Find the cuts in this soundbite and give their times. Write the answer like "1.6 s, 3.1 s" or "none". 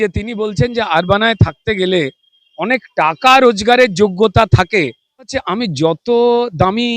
5.4 s